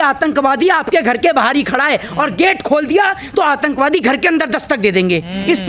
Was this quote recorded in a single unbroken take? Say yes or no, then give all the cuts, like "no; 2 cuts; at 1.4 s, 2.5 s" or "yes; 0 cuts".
yes; 0 cuts